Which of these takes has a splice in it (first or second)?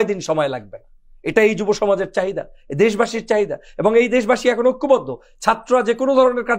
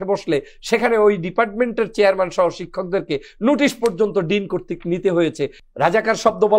second